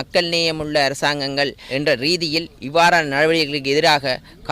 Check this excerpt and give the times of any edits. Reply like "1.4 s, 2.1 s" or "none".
1.6 s